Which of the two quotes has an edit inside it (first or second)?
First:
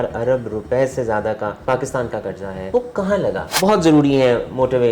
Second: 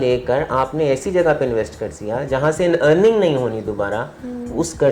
first